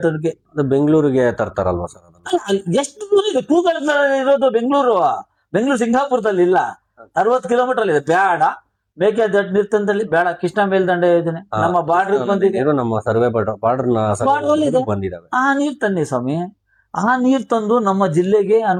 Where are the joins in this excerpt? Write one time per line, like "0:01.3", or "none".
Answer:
none